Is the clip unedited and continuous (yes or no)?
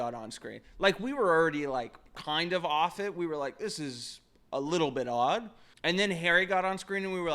no